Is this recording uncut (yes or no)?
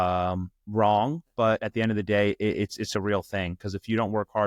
yes